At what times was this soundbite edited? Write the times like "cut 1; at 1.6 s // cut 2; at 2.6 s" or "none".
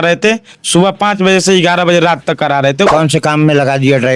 cut 1; at 2.9 s